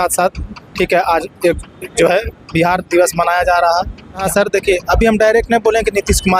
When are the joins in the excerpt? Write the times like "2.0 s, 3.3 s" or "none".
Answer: 4.2 s